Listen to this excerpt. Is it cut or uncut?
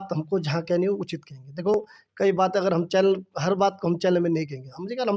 uncut